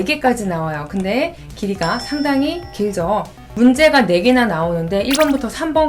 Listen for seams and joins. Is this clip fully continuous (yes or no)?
no